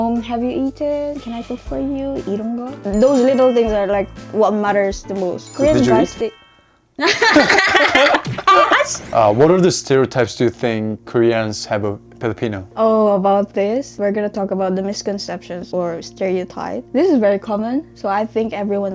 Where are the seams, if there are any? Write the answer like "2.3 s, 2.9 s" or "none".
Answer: 2.7 s, 5.4 s, 9.1 s